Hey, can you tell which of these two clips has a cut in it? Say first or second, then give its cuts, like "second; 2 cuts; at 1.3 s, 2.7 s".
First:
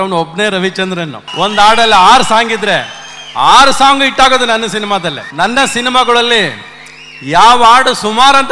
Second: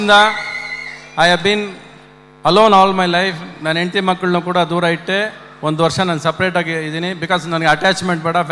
first; 2 cuts; at 1.2 s, 5.2 s